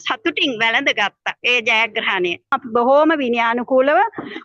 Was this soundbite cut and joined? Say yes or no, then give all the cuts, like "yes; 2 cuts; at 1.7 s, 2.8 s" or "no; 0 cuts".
yes; 2 cuts; at 1.3 s, 2.6 s